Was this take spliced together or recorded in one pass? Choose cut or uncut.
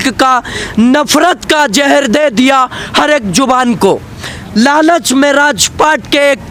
uncut